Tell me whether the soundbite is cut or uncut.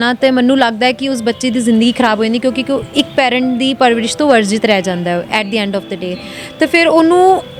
uncut